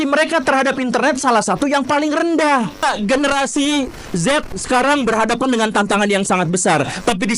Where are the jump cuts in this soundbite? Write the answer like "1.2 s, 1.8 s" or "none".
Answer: 2.8 s